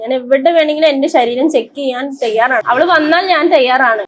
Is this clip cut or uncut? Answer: cut